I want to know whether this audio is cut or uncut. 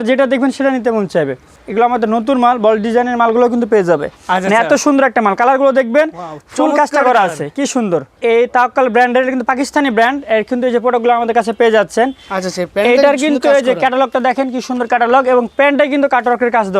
cut